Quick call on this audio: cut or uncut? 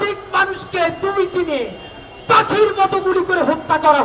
uncut